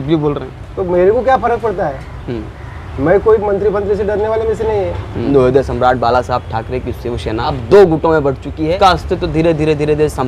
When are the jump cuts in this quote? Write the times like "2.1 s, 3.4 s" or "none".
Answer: 5.3 s, 7.6 s, 8.8 s